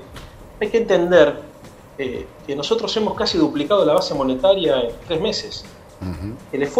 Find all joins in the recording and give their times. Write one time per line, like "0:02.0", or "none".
none